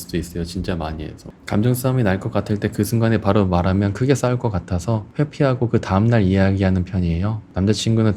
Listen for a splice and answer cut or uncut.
cut